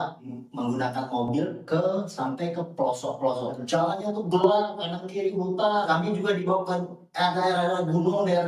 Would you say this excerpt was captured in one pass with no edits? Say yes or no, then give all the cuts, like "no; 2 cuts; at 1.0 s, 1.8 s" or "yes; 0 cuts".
no; 2 cuts; at 3.6 s, 5.9 s